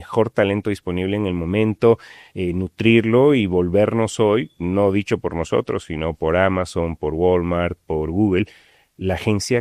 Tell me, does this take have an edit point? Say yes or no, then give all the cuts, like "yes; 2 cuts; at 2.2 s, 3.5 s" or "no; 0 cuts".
no; 0 cuts